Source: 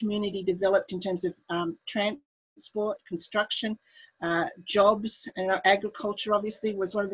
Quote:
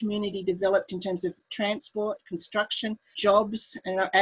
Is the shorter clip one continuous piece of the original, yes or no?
no